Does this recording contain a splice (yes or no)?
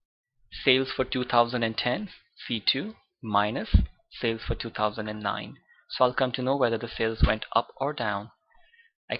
no